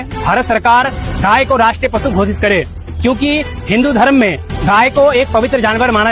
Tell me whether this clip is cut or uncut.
uncut